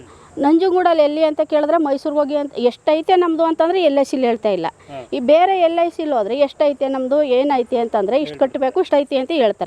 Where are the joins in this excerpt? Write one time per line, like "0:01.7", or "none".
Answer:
none